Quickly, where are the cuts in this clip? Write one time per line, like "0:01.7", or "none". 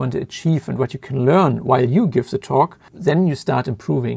0:02.9